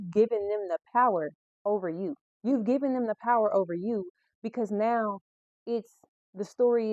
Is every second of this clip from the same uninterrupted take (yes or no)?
yes